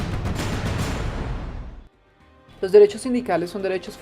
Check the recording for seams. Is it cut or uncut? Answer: cut